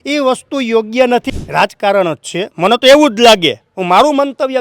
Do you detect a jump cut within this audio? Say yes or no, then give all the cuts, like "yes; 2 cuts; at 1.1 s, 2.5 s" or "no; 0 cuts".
yes; 1 cut; at 1.3 s